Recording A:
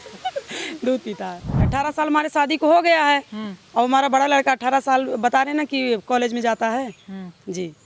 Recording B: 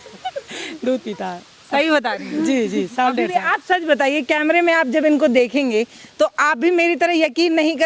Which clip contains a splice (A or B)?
A